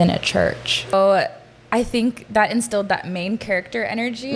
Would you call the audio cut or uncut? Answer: cut